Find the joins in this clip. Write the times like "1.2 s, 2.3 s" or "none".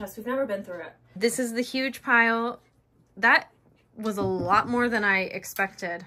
1.1 s

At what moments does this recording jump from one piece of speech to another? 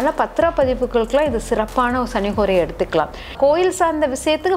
3.3 s

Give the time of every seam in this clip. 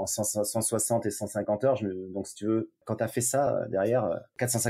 2.8 s

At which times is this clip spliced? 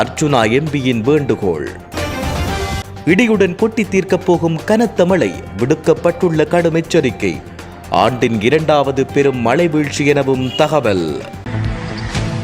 11.3 s

